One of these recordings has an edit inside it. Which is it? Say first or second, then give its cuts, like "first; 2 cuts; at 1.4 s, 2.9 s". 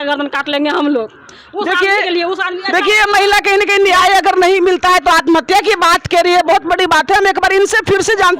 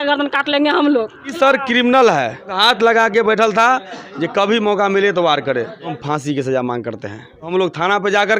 second; 4 cuts; at 1.3 s, 2.5 s, 6.0 s, 7.5 s